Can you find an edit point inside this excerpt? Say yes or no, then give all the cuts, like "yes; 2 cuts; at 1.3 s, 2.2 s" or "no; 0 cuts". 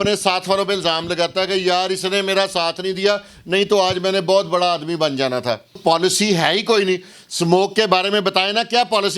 yes; 1 cut; at 5.8 s